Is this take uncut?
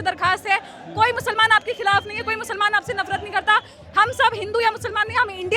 yes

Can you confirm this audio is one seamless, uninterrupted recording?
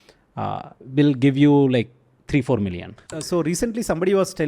no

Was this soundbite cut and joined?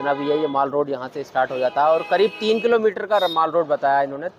no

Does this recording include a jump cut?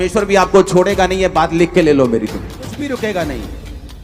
yes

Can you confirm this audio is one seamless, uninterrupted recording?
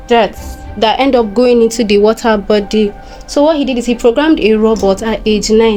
yes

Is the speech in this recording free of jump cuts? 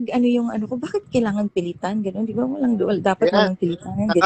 yes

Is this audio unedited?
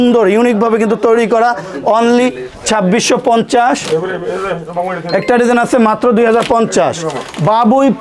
yes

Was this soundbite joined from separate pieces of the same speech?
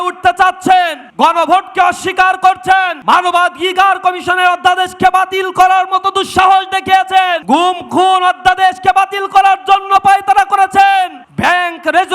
yes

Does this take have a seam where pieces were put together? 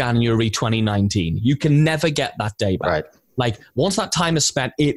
no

